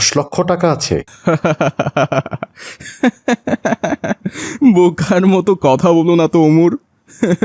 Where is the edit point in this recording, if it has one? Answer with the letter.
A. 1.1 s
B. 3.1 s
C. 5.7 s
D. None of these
A